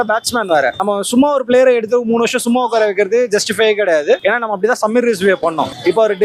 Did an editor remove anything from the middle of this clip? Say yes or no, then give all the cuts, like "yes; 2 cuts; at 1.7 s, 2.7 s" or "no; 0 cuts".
no; 0 cuts